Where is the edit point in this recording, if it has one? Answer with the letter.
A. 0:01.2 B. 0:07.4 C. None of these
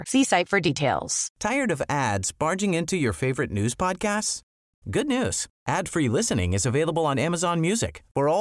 A